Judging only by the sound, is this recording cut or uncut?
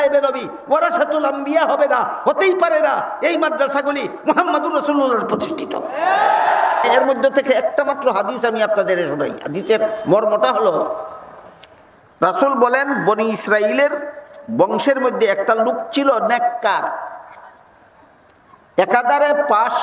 cut